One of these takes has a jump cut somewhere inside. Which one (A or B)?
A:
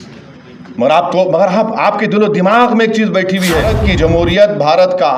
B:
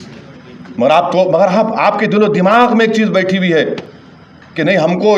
A